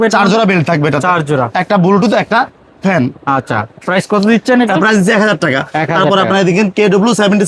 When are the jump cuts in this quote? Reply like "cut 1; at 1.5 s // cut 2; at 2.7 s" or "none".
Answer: none